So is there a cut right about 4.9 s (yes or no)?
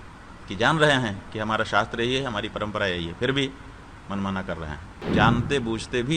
yes